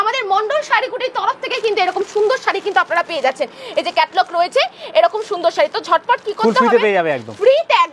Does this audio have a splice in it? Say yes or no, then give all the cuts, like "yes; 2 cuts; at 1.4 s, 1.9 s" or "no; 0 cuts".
no; 0 cuts